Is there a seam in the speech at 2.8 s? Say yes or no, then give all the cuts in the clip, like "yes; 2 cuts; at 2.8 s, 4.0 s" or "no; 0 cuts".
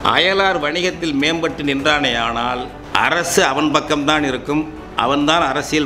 yes; 1 cut; at 2.8 s